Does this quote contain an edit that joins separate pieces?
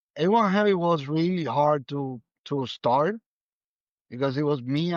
no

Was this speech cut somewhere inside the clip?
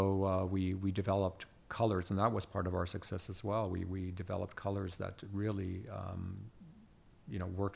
no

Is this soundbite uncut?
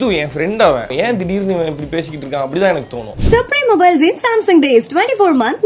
no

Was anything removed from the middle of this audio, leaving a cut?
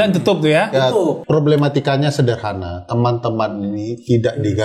yes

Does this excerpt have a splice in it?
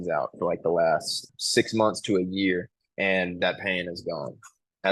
yes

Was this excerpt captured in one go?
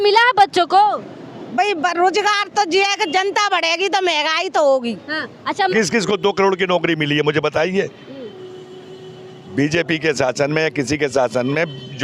no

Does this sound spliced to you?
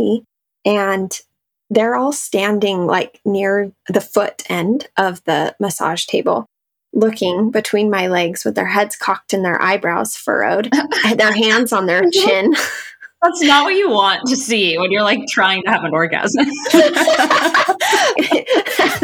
yes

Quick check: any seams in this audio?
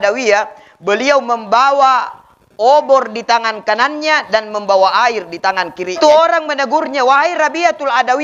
yes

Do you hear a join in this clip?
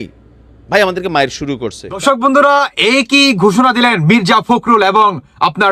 yes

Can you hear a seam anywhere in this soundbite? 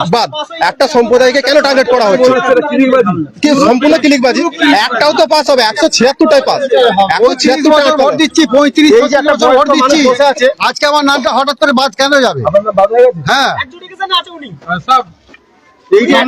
no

